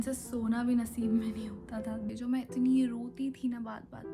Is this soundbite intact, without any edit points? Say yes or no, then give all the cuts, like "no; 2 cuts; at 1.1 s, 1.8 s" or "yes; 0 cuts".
no; 1 cut; at 2.1 s